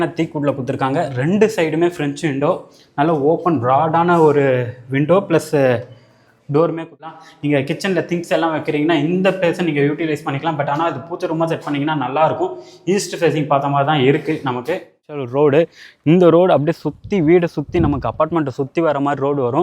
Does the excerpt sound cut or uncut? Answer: cut